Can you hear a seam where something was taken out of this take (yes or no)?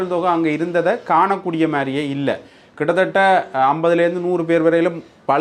no